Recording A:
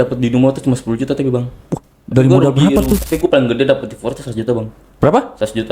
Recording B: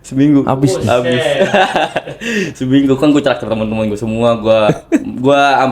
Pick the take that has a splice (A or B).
A